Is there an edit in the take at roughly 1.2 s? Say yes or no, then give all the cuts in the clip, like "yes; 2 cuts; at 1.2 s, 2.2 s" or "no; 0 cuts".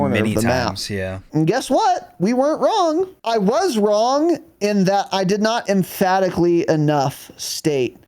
yes; 2 cuts; at 1.2 s, 3.2 s